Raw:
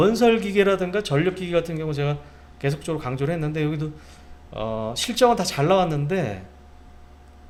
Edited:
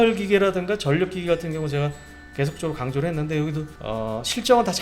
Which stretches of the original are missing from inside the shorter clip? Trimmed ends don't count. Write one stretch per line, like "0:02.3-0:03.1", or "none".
0:04.0-0:04.4

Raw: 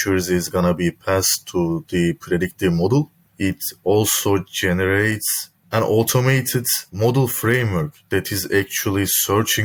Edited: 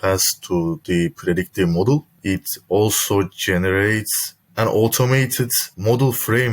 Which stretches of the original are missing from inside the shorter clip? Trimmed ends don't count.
0:03.2-0:03.3

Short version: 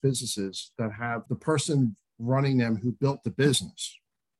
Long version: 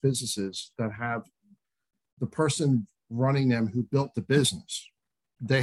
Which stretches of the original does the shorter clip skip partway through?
0:01.2-0:02.1

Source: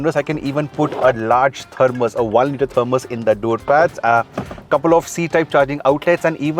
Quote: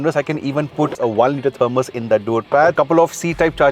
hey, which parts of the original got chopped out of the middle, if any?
0:01.0-0:02.1
0:03.9-0:04.7

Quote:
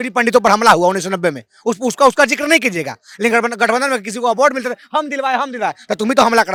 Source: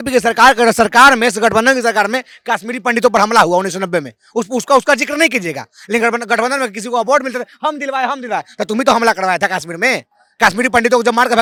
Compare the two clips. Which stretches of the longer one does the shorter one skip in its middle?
none

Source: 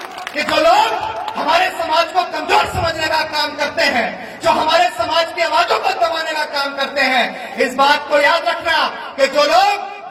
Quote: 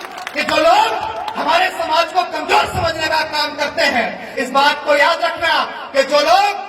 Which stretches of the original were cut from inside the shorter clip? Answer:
0:04.3-0:07.6

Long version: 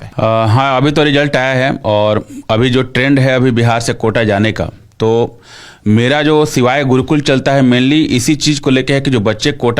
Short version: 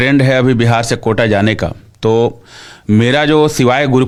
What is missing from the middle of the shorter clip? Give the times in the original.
none

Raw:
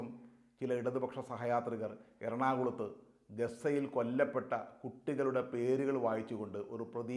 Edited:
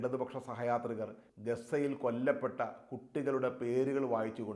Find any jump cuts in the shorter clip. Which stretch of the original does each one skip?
0:02.0-0:03.1

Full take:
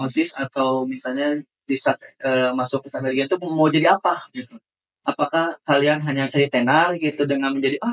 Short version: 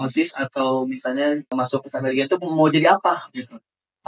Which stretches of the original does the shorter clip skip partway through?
0:01.5-0:02.5

